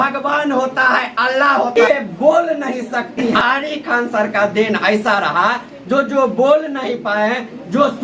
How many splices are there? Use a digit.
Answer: 2